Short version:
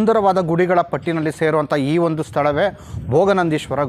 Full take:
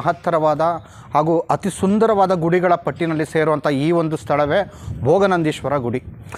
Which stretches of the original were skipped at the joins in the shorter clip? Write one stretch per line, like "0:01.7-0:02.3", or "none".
none